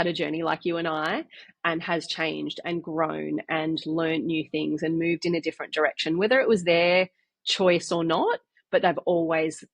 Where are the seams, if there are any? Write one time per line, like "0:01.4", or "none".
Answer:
none